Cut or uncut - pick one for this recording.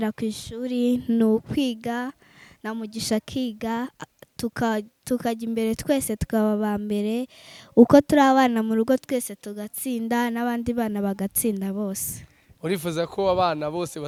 uncut